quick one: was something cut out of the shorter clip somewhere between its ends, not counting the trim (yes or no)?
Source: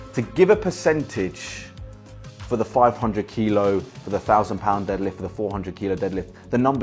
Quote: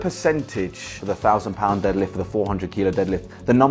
yes